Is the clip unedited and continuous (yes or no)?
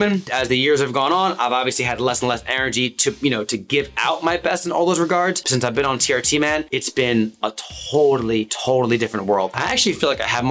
yes